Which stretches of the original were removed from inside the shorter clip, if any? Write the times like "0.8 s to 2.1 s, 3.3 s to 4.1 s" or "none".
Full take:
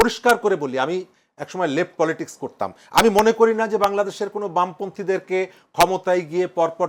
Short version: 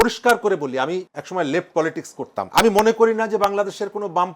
1.2 s to 1.4 s, 2.7 s to 2.9 s